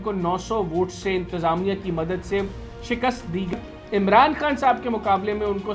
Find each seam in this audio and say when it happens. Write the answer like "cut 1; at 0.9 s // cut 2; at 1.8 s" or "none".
cut 1; at 3.5 s